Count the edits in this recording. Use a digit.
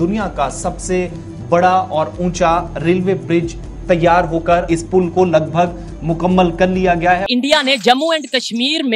2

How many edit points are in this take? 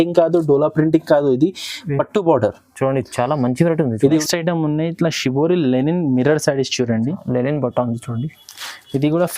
1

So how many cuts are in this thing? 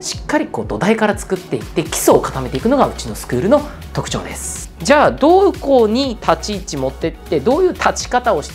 1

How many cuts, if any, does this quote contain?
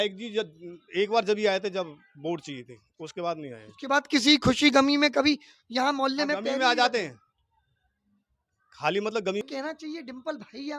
1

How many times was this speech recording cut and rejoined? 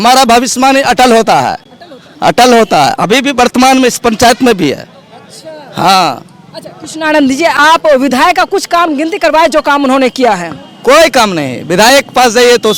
0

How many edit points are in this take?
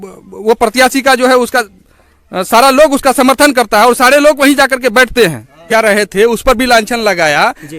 0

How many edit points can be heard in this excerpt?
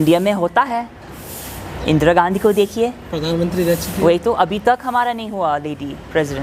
0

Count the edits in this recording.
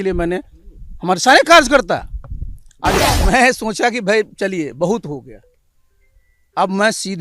1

